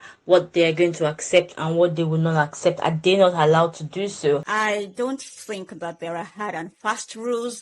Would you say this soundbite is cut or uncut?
cut